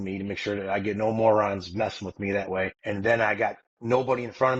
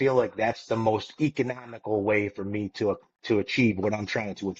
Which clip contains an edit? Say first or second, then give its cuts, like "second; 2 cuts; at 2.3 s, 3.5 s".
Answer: first; 1 cut; at 2.8 s